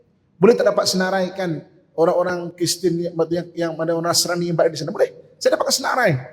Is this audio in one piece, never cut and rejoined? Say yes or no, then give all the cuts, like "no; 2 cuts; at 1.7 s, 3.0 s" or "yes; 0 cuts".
yes; 0 cuts